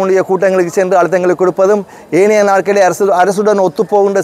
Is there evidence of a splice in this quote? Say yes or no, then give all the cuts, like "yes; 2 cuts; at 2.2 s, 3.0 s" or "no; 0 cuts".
no; 0 cuts